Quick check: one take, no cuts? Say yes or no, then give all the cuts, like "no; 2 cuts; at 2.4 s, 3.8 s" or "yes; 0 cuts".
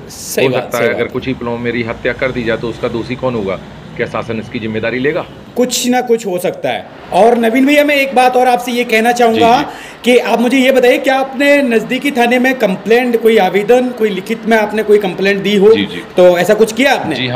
yes; 0 cuts